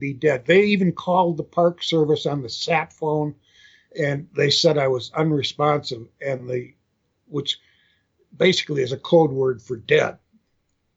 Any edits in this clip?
no; 0 cuts

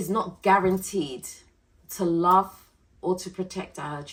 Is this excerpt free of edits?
yes; 0 cuts

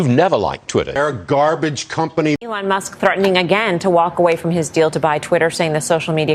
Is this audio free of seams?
no; 2 cuts; at 0.9 s, 2.5 s

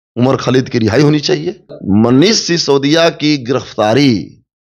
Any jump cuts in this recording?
yes; 1 cut; at 1.2 s

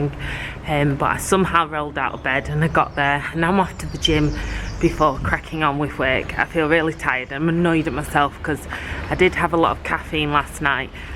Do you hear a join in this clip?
no; 0 cuts

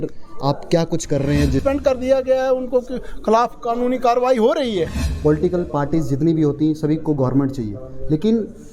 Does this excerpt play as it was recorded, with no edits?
no; 2 cuts; at 1.6 s, 5.0 s

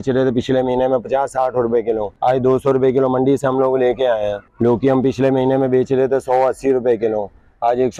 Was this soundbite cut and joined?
yes; 2 cuts; at 2.1 s, 4.4 s

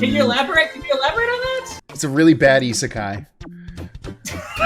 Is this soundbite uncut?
no; 1 cut; at 1.8 s

